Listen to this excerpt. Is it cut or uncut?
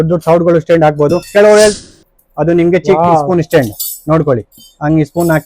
cut